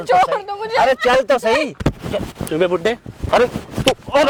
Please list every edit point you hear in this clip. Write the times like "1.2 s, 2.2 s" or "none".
none